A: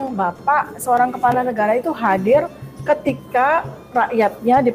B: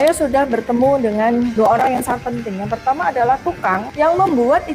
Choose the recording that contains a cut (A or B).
B